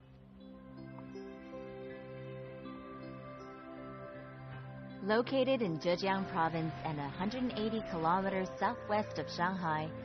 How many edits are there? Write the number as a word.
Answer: one